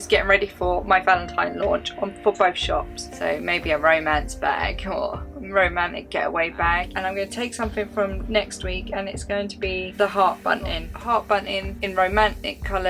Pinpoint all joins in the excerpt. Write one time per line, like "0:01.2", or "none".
0:03.1
0:06.9
0:11.0